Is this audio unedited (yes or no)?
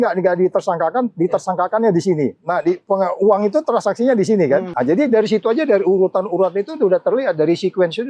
no